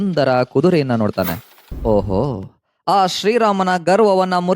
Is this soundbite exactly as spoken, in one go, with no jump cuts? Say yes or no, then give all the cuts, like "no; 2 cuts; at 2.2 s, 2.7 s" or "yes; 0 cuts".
no; 1 cut; at 1.6 s